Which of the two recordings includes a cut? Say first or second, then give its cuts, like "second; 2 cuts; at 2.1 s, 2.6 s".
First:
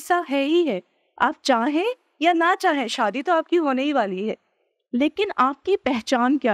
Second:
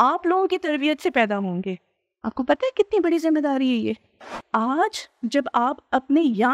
second; 1 cut; at 4.4 s